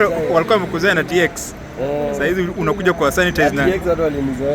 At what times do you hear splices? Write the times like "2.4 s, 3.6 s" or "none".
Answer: none